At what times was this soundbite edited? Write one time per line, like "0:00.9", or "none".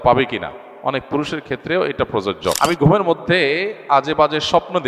0:02.6